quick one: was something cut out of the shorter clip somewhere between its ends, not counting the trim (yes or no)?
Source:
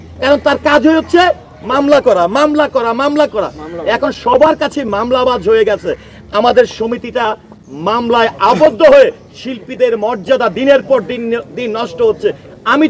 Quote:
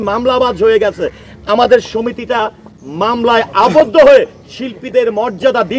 no